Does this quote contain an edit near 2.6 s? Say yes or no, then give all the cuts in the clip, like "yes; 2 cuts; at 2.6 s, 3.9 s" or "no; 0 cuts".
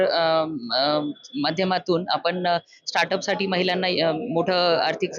no; 0 cuts